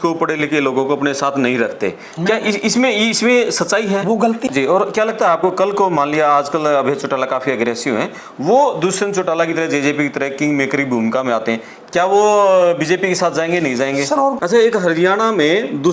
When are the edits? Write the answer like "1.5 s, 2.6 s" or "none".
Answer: 4.4 s, 14.4 s